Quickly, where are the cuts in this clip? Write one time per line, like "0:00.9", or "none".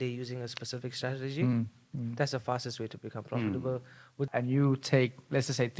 0:04.3